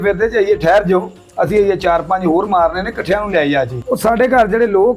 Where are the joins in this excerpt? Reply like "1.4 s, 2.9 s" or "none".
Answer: 3.8 s